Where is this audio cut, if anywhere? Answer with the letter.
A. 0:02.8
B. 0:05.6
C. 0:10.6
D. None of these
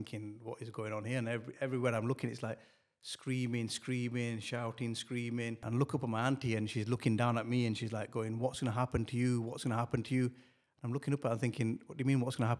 B